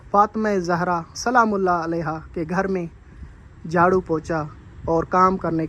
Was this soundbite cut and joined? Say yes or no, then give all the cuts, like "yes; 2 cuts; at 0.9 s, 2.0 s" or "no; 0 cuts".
no; 0 cuts